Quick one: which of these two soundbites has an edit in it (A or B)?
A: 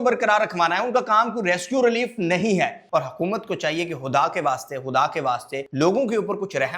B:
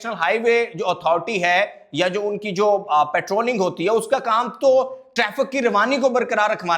A